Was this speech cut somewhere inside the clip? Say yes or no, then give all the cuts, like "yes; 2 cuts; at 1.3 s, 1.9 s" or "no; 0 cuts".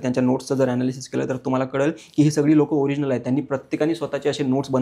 no; 0 cuts